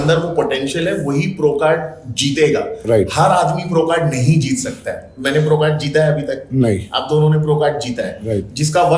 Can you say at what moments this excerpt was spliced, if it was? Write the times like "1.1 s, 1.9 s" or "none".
none